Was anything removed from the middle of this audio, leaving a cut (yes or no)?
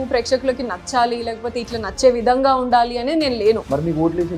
no